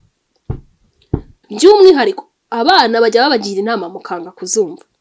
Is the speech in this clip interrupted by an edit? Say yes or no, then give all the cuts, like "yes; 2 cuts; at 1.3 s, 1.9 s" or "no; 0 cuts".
yes; 1 cut; at 1.4 s